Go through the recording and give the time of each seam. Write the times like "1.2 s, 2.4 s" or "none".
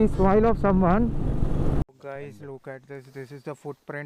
1.8 s